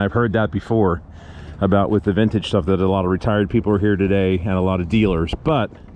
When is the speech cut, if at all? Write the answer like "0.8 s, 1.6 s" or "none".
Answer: none